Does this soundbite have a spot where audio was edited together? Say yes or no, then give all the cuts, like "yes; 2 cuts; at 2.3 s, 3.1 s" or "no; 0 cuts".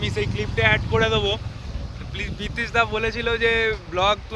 no; 0 cuts